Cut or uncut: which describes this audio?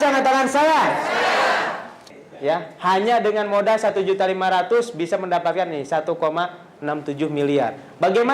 cut